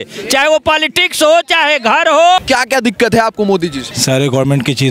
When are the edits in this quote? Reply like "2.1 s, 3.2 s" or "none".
2.4 s, 3.9 s